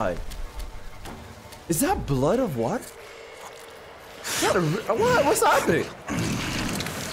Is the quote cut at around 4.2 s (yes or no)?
no